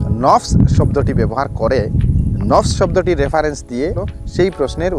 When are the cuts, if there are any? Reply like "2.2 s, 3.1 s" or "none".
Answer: 4.0 s